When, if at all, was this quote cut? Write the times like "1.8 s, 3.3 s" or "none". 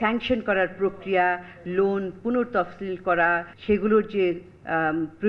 3.5 s